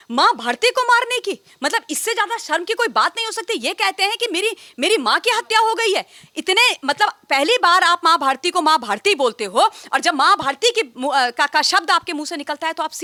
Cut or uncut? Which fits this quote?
uncut